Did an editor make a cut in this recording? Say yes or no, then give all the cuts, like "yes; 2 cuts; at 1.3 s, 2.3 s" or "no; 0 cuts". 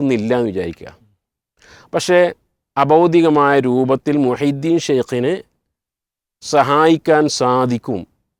no; 0 cuts